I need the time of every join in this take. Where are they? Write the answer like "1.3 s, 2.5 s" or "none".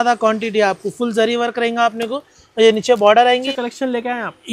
3.4 s